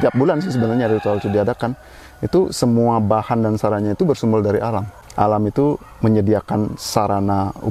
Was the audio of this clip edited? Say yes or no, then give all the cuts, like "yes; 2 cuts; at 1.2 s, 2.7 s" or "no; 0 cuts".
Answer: yes; 1 cut; at 5.0 s